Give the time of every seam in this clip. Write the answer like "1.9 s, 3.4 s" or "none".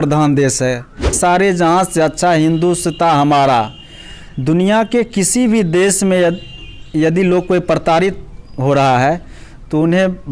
1.1 s